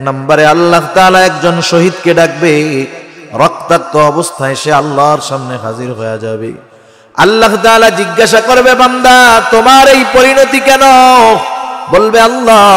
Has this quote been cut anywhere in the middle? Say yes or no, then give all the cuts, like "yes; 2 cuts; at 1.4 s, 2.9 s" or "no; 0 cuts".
no; 0 cuts